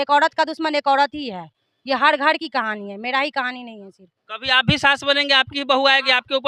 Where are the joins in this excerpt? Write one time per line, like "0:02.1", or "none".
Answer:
none